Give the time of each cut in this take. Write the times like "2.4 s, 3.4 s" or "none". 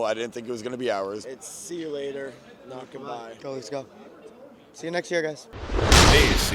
1.2 s, 3.4 s, 5.5 s